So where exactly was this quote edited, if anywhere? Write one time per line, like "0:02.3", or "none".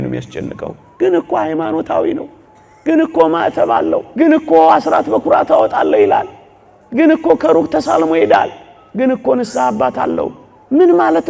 0:04.1